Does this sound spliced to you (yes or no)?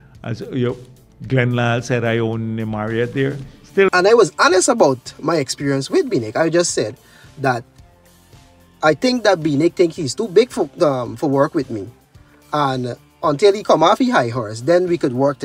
yes